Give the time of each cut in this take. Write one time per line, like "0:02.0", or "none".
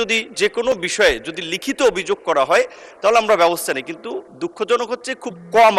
none

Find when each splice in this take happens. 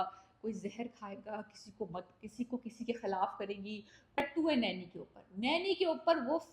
0:04.2

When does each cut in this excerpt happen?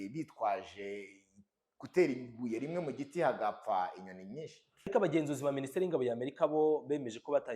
0:04.9

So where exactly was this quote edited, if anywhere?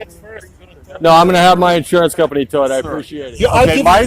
0:03.0

